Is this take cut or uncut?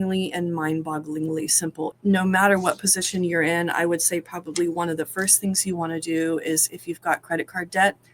cut